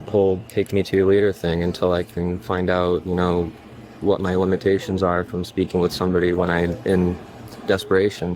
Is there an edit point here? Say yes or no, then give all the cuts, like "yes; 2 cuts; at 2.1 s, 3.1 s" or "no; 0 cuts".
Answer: no; 0 cuts